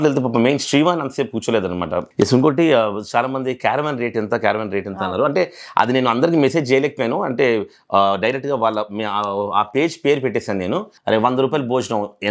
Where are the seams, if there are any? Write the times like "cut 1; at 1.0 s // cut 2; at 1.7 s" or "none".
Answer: cut 1; at 2.1 s // cut 2; at 10.9 s